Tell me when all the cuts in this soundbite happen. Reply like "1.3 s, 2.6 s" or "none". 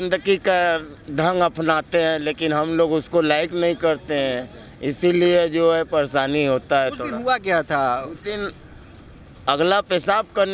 none